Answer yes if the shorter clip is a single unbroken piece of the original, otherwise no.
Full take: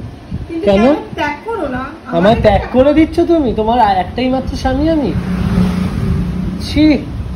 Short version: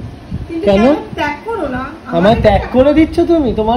yes